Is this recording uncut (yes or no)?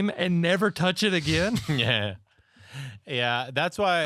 yes